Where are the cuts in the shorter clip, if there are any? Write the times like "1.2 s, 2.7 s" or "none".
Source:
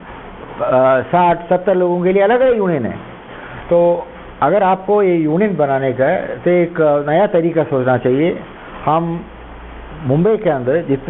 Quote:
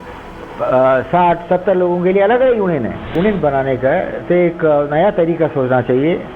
3.1 s